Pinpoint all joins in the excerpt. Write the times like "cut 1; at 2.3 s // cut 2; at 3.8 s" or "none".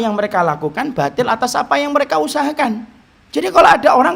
none